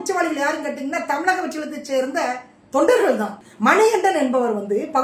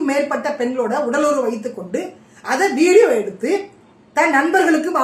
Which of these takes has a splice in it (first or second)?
first